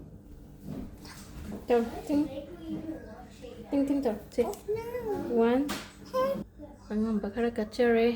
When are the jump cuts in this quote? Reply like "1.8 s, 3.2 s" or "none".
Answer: 6.4 s